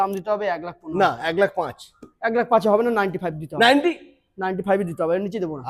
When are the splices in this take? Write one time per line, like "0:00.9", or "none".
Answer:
none